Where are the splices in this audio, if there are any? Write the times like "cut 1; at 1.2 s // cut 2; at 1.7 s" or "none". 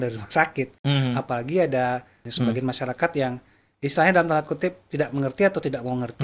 cut 1; at 2.2 s